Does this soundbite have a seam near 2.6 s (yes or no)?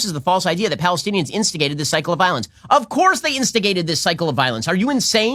no